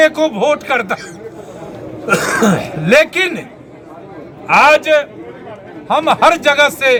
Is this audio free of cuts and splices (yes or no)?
yes